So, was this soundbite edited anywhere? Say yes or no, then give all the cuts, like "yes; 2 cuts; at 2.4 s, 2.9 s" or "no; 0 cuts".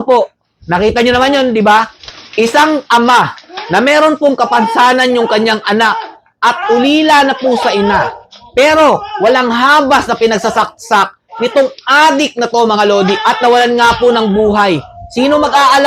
no; 0 cuts